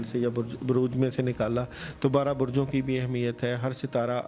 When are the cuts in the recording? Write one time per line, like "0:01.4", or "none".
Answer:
none